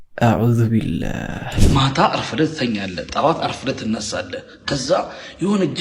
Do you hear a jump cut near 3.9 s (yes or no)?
no